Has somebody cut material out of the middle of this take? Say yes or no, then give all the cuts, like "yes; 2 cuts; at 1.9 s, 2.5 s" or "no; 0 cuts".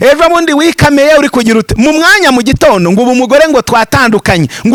no; 0 cuts